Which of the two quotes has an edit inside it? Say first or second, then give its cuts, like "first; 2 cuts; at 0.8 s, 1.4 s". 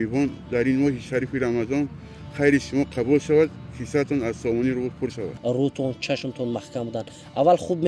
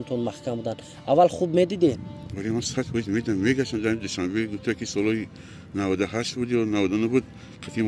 first; 1 cut; at 5.3 s